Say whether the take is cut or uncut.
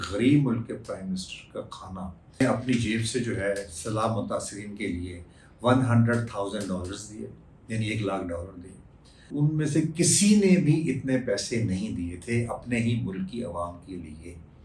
cut